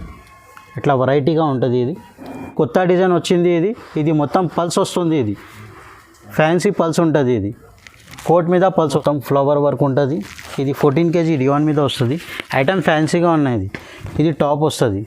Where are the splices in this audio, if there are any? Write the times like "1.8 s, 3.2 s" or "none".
2.5 s, 9.0 s